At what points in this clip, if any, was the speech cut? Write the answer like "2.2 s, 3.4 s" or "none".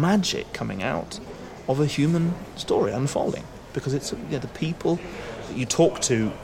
5.5 s